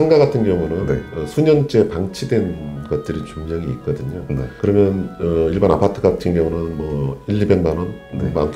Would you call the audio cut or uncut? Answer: uncut